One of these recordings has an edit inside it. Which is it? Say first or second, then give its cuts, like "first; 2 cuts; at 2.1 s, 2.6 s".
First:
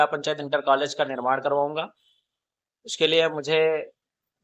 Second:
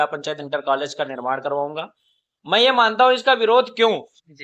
second; 1 cut; at 2.3 s